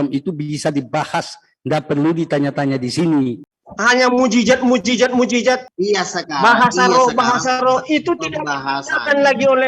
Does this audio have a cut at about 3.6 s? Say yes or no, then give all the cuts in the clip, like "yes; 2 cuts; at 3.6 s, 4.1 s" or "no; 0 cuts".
yes; 2 cuts; at 3.6 s, 5.7 s